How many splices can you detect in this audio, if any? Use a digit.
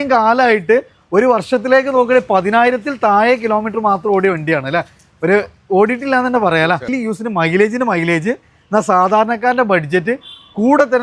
1